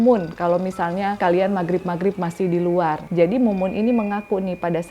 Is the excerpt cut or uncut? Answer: cut